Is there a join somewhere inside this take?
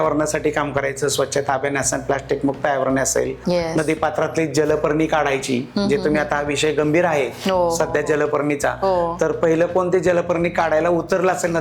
yes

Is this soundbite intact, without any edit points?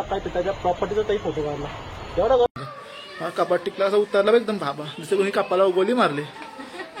no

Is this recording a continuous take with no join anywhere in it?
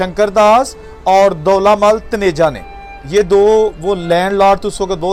yes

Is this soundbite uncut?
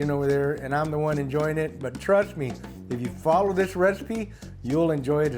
yes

